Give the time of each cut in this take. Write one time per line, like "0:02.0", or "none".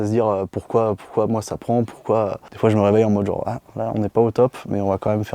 none